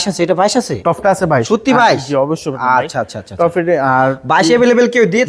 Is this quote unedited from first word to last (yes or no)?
yes